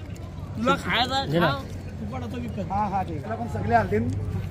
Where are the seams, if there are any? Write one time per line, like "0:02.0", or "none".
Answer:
0:03.2

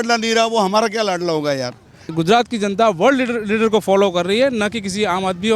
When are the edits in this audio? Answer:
0:02.1

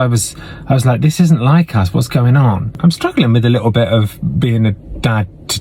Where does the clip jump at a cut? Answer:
0:02.7

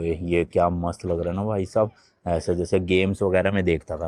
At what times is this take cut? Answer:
none

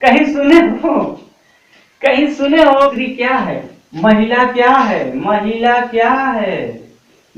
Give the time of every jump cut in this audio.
0:02.9

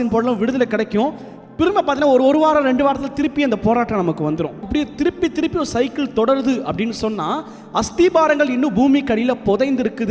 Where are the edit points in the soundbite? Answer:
0:04.6

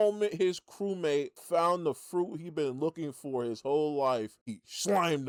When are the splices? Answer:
none

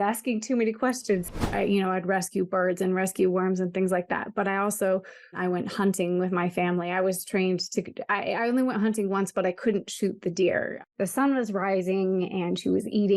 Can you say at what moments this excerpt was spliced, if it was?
0:01.5
0:05.4
0:10.7

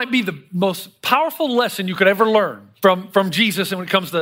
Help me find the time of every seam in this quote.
0:02.6

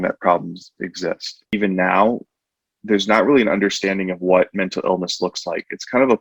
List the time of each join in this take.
0:01.5

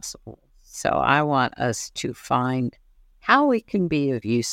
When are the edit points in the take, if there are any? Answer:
none

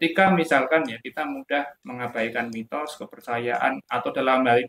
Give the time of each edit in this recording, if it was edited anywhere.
none

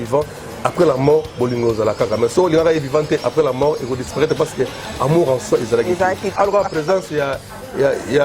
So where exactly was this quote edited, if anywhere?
0:06.3

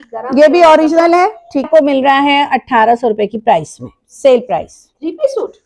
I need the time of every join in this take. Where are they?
0:01.7

